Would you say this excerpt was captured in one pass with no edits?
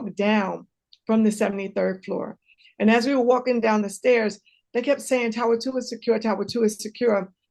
yes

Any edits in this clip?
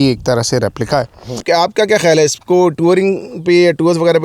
yes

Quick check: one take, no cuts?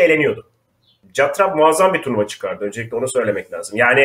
no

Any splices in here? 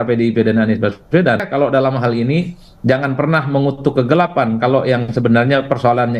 yes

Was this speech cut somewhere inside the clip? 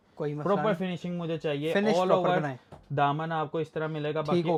no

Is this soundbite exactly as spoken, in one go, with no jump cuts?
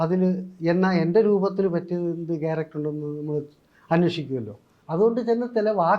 no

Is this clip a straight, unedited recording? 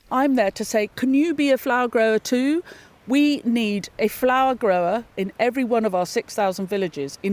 no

